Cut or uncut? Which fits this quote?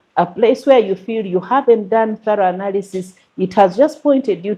uncut